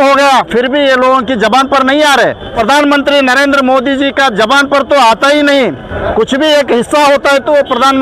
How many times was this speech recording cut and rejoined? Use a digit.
2